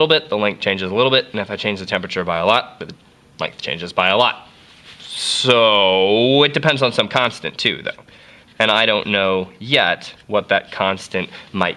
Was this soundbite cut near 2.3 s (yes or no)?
no